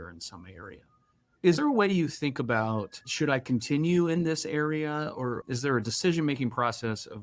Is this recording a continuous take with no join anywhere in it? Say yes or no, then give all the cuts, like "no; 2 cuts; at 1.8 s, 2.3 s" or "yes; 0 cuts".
yes; 0 cuts